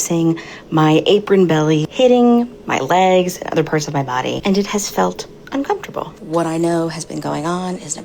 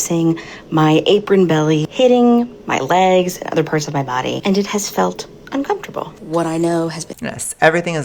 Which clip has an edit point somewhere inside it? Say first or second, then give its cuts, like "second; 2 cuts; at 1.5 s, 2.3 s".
first; 1 cut; at 7.1 s